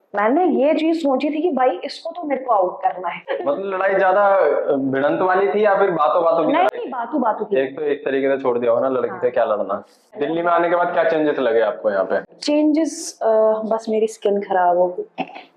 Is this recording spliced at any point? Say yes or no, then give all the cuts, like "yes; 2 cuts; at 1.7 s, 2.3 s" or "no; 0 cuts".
yes; 2 cuts; at 3.2 s, 10.1 s